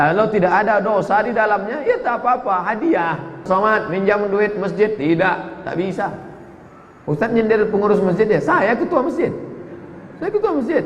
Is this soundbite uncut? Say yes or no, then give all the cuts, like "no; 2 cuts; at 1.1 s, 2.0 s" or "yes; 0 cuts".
no; 1 cut; at 3.4 s